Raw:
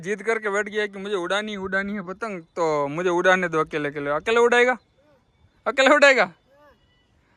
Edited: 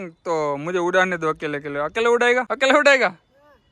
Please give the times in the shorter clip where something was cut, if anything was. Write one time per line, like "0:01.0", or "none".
0:02.5